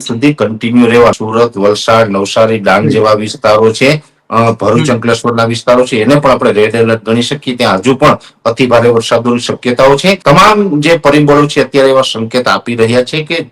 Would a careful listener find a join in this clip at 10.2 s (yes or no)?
yes